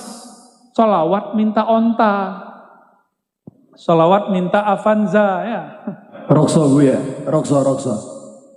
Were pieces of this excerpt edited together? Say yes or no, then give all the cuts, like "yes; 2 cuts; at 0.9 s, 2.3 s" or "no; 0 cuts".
yes; 1 cut; at 6.1 s